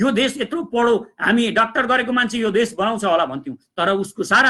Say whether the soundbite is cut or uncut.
uncut